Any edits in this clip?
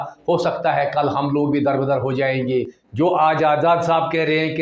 yes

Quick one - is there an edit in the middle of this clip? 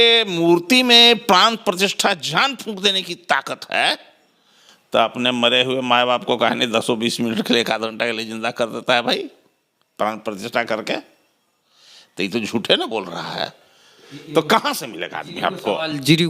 no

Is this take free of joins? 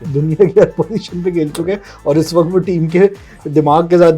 yes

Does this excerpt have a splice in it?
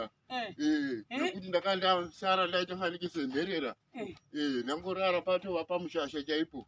no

